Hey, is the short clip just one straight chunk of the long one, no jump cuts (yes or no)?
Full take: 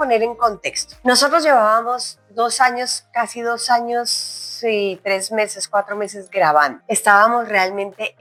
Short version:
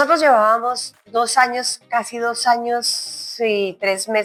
yes